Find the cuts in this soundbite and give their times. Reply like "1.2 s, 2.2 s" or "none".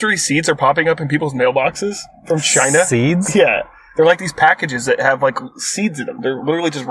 none